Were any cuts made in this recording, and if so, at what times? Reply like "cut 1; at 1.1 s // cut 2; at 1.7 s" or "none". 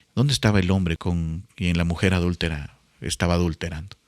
cut 1; at 1.0 s